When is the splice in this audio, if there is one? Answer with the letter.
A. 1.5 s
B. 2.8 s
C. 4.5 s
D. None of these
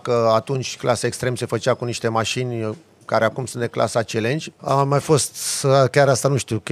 C